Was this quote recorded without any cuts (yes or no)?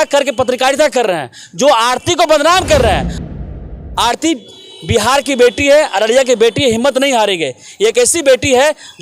no